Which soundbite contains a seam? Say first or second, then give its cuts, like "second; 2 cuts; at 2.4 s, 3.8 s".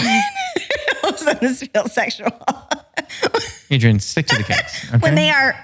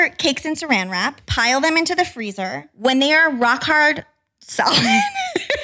second; 1 cut; at 1.1 s